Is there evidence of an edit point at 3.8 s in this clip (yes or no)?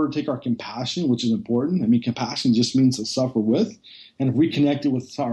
no